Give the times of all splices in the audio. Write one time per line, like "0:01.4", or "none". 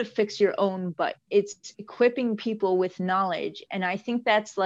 0:01.2